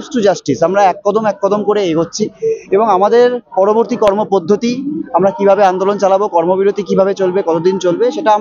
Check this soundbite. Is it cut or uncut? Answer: uncut